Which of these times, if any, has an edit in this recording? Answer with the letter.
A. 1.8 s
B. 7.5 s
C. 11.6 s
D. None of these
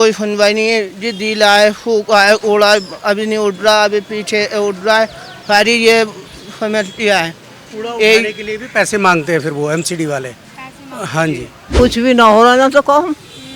C